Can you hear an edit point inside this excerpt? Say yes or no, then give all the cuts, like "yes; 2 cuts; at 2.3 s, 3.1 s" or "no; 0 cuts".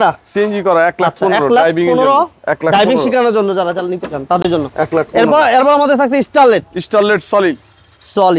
no; 0 cuts